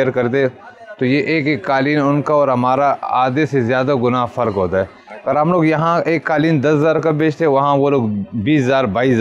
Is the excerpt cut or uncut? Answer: uncut